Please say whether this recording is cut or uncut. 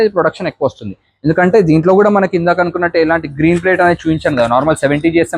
uncut